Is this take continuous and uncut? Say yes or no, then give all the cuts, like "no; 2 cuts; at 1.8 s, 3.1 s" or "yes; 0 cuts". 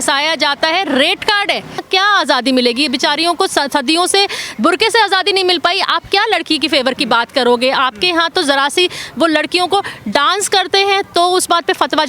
no; 1 cut; at 1.9 s